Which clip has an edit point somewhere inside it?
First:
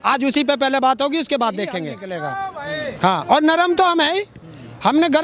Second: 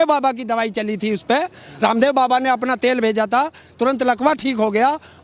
first; 1 cut; at 2.0 s

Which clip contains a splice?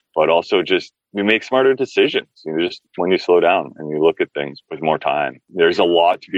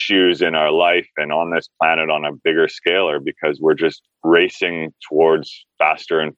first; 3 cuts; at 1.0 s, 4.6 s, 5.4 s

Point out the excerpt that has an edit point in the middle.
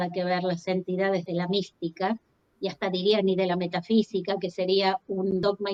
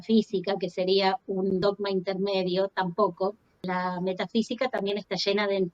second; 1 cut; at 3.6 s

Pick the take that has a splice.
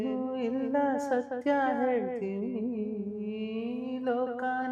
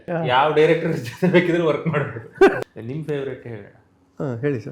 second; 1 cut; at 2.6 s

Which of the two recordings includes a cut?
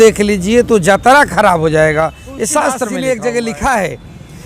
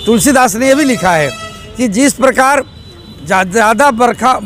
first; 1 cut; at 2.9 s

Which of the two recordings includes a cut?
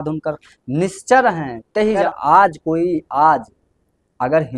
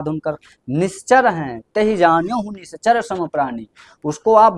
first; 1 cut; at 2.0 s

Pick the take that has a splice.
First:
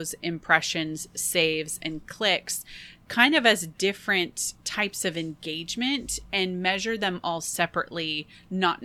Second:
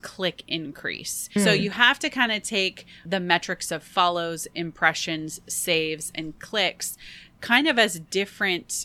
second; 2 cuts; at 1.4 s, 3.0 s

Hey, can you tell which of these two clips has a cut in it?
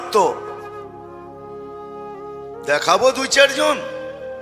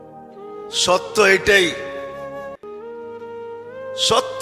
second; 2 cuts; at 1.7 s, 3.3 s

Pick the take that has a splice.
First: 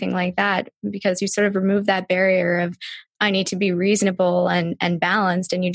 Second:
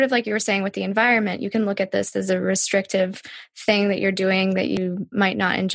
second; 1 cut; at 4.8 s

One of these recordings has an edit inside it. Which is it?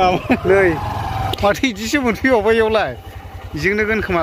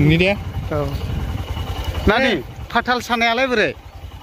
first; 1 cut; at 1.3 s

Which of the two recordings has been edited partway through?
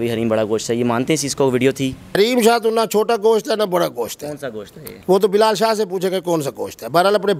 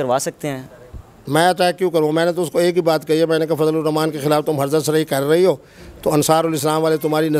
first; 1 cut; at 2.2 s

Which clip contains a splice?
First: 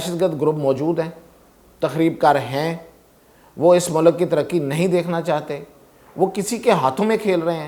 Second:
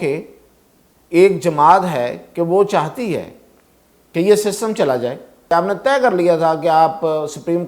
second; 1 cut; at 5.5 s

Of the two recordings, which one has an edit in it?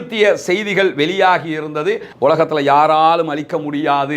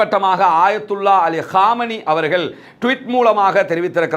first; 1 cut; at 2.1 s

